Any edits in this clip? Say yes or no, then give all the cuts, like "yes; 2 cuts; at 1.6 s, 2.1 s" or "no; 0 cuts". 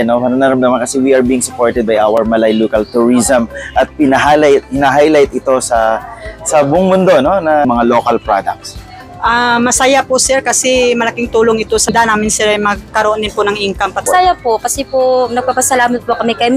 yes; 3 cuts; at 7.6 s, 11.9 s, 14.1 s